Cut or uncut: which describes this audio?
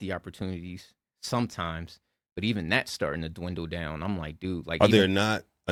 uncut